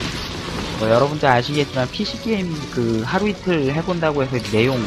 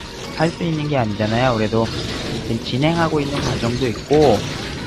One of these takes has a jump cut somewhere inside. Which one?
second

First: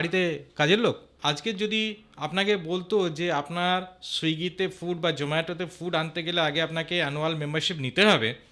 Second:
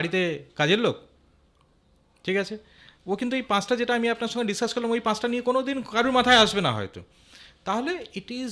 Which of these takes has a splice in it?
first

